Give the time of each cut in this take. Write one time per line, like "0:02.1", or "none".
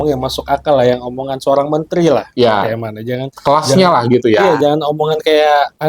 none